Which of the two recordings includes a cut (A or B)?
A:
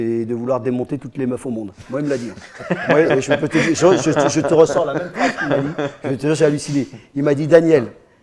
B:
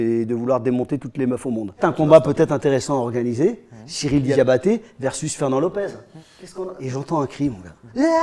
B